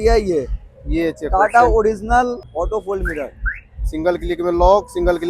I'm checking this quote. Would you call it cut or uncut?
cut